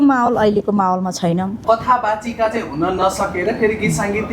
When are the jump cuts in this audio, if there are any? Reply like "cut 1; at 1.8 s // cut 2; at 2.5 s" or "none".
cut 1; at 1.5 s